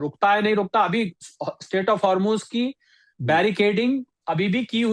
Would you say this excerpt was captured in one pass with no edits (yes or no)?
yes